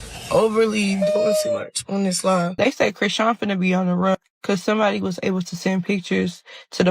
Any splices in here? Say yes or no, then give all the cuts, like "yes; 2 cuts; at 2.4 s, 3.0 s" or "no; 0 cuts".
yes; 1 cut; at 2.6 s